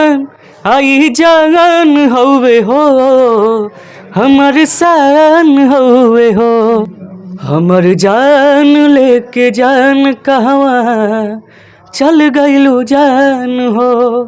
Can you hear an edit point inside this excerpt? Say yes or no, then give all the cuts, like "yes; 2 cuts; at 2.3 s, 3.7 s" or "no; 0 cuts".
yes; 1 cut; at 6.8 s